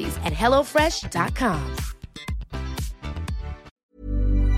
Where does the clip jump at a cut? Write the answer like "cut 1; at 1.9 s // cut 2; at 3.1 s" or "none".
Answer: cut 1; at 3.7 s